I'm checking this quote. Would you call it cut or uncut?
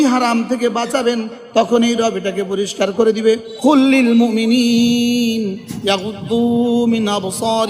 cut